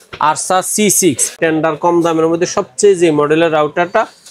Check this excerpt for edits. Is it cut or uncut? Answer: cut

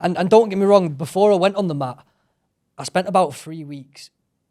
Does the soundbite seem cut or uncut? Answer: uncut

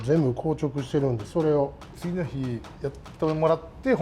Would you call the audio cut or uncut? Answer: cut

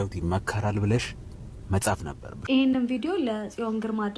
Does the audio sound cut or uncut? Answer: cut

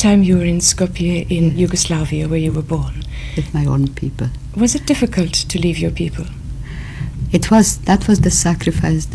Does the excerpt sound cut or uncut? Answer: uncut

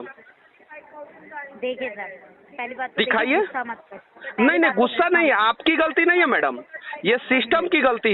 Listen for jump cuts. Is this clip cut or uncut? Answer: uncut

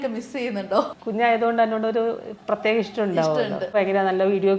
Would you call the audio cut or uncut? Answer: cut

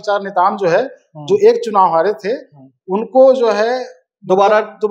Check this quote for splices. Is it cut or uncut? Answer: uncut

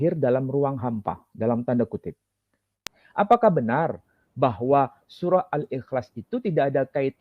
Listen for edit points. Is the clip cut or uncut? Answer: cut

